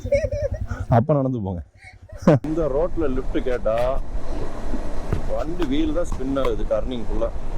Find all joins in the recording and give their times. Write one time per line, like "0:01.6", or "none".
0:02.4